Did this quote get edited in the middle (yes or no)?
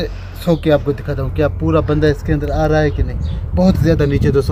no